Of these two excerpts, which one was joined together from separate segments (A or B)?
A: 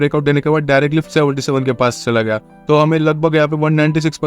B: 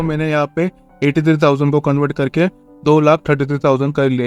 A